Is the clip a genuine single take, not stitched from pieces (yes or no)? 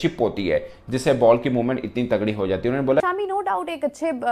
no